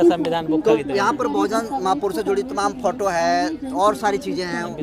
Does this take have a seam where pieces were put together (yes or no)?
no